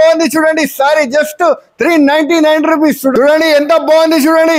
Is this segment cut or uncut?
cut